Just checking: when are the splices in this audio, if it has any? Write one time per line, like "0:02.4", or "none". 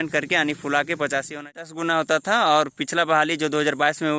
0:01.6